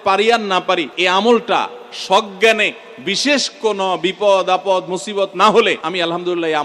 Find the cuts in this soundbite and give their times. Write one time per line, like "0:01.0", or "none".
0:00.9
0:05.8